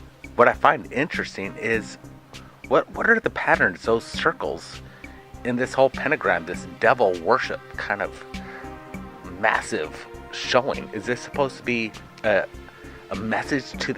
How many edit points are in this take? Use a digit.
1